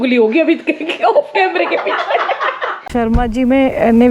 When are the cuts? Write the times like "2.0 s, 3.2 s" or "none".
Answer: 2.9 s